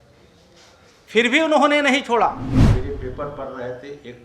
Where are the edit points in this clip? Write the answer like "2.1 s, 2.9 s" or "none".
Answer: 2.7 s